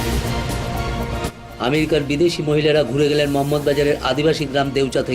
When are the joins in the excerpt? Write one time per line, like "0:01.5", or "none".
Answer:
0:01.4